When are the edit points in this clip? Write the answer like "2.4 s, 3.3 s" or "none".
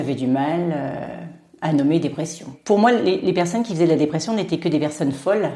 2.5 s